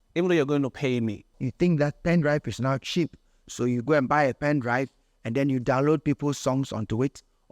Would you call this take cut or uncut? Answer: cut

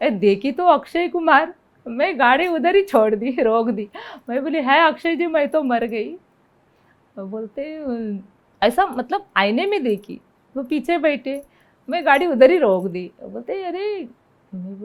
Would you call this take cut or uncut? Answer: uncut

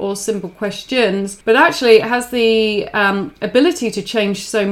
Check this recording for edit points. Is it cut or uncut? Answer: cut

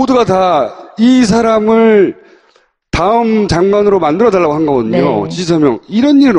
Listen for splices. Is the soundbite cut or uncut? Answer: uncut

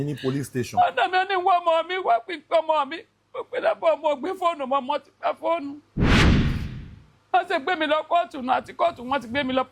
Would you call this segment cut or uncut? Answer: uncut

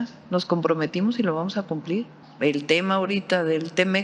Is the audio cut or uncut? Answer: cut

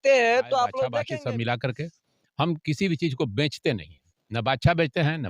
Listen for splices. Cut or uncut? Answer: cut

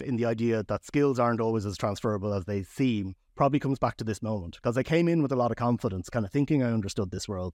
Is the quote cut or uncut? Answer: uncut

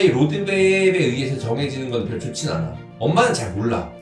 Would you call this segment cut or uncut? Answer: uncut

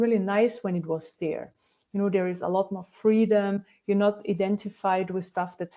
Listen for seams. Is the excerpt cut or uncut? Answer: uncut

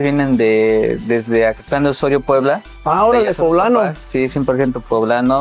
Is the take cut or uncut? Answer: uncut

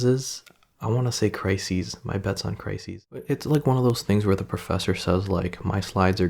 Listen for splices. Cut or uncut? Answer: cut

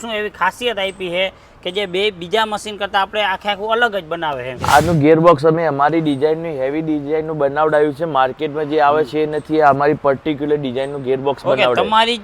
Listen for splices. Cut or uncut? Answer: cut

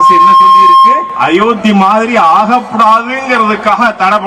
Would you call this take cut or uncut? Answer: cut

